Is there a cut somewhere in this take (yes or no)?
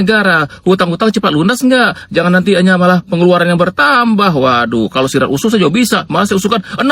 no